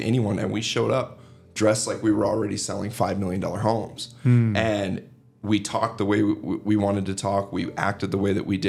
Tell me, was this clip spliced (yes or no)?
no